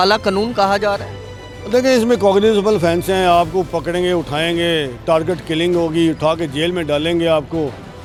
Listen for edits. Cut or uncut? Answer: uncut